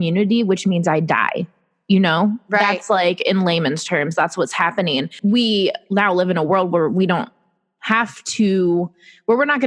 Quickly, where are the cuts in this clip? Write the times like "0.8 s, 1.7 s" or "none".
5.1 s